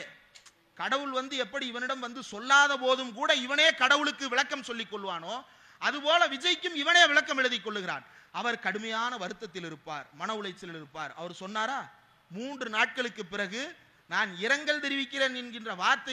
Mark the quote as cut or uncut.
uncut